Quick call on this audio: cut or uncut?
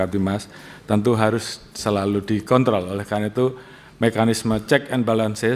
uncut